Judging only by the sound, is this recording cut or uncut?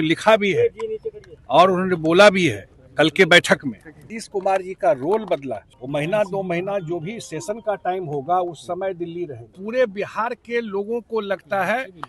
cut